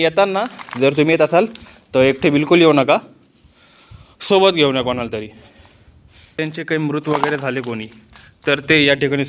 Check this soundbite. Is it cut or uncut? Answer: cut